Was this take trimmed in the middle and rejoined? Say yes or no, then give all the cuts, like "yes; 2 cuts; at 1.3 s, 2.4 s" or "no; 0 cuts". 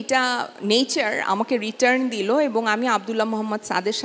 no; 0 cuts